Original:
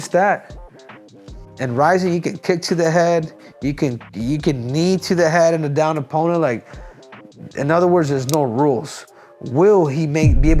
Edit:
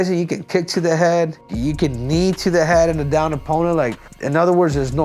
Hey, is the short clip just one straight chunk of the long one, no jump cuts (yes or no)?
no